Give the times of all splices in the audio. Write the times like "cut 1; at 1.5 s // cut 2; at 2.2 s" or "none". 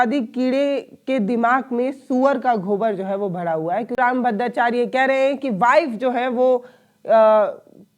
cut 1; at 4.0 s